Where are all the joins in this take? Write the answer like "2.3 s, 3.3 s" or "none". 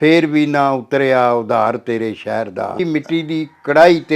2.8 s